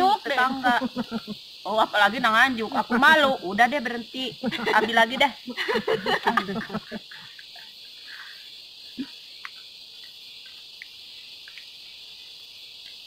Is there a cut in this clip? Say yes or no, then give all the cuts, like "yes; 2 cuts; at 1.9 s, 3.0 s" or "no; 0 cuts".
no; 0 cuts